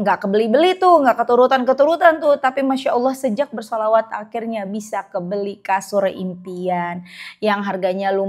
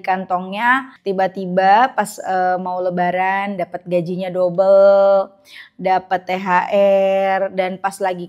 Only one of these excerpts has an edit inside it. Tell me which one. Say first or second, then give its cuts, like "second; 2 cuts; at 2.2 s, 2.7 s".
second; 1 cut; at 0.9 s